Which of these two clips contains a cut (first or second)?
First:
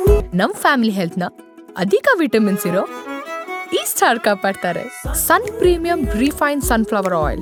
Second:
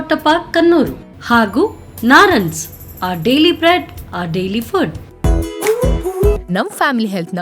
second